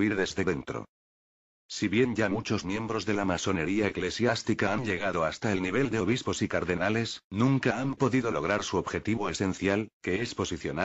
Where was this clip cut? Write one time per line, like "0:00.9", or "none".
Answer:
none